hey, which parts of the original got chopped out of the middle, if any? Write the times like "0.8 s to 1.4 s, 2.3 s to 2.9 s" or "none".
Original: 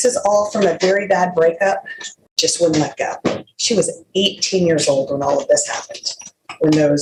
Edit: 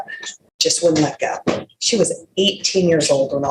none